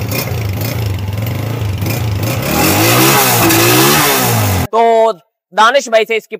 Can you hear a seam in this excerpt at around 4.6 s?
yes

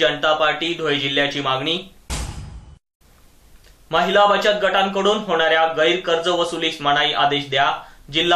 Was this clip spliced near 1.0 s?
no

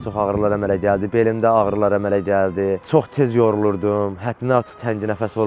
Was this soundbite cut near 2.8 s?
yes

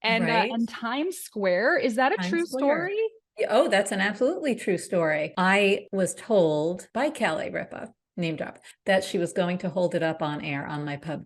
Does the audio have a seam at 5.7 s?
yes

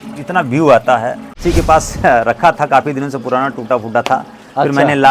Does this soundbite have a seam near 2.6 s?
no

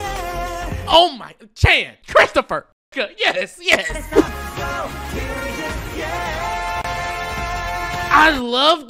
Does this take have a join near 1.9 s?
yes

